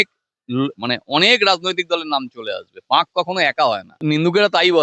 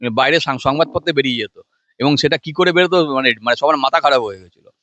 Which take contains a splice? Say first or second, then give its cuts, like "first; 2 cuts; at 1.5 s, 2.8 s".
first; 1 cut; at 3.9 s